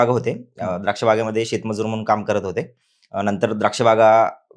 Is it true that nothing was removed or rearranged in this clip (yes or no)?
yes